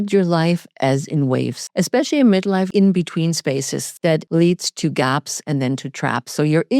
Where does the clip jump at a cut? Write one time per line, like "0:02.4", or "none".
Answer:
0:01.6
0:02.7
0:04.1